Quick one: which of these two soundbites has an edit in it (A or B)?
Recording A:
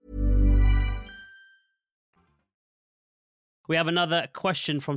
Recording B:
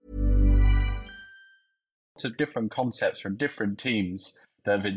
B